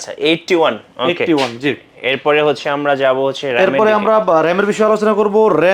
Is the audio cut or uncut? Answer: uncut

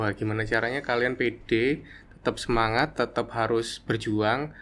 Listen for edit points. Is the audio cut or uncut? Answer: uncut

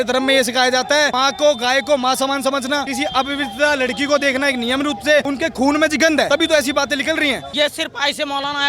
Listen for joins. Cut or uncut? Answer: cut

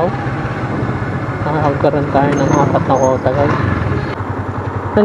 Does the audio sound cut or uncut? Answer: cut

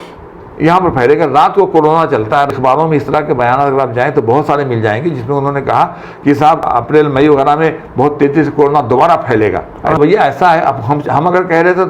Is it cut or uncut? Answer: cut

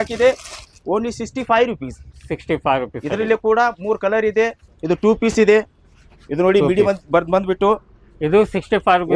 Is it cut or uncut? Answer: uncut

